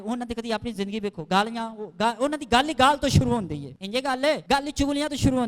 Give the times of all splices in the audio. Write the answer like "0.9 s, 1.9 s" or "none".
3.7 s, 4.4 s